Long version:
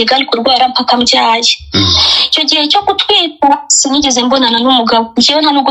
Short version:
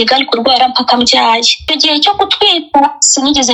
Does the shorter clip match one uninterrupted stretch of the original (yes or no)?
no